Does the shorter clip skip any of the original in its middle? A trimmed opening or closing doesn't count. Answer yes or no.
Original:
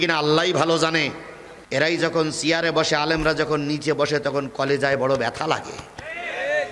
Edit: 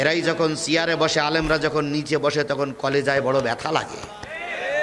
no